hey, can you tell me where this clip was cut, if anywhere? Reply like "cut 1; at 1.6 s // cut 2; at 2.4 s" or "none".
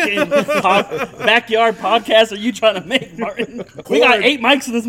cut 1; at 3.8 s